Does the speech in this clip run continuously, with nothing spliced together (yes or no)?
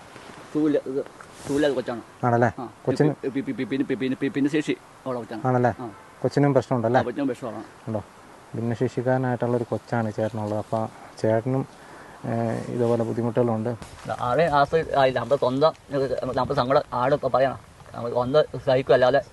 no